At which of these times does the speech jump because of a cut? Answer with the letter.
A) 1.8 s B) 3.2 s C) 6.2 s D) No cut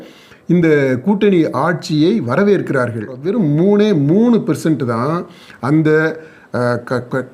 B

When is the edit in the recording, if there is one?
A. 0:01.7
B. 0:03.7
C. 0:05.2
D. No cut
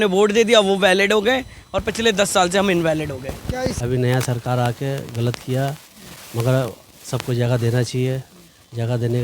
B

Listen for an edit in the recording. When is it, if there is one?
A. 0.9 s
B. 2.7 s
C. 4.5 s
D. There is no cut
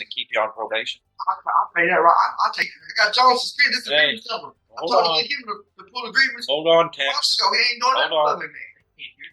B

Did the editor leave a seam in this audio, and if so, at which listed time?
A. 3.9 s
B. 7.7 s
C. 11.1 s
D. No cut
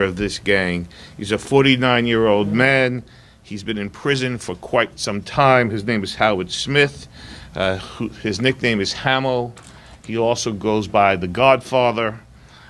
D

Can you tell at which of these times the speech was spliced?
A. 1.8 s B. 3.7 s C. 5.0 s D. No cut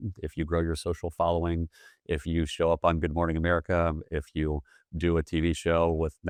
D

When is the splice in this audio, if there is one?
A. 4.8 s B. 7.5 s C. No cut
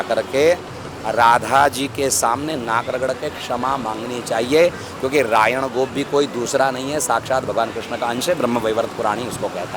C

